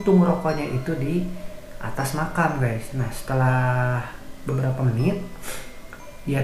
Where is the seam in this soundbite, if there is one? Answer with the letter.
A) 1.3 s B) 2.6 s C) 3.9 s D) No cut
D